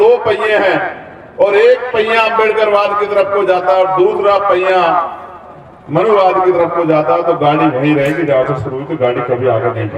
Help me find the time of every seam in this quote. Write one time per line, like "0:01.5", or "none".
none